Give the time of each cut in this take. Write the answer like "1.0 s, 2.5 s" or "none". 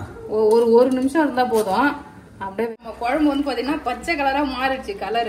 2.7 s